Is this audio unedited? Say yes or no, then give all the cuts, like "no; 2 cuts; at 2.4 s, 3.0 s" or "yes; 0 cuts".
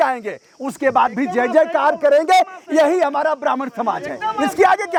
yes; 0 cuts